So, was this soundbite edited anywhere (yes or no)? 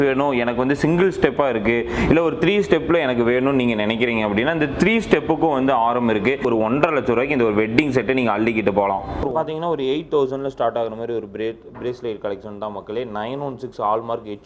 yes